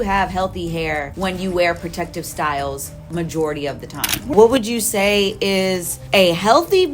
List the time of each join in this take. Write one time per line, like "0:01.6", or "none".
0:01.1
0:04.3
0:05.9